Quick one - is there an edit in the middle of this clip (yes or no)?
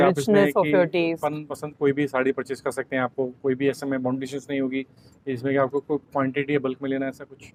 no